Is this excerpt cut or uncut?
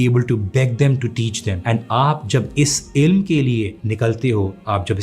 cut